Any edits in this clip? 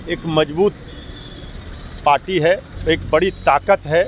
yes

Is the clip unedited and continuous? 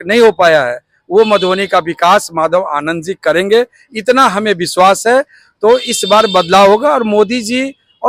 yes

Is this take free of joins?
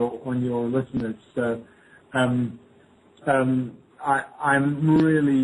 no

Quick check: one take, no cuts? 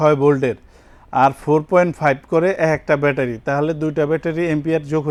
yes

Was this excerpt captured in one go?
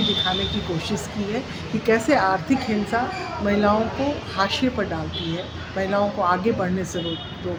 yes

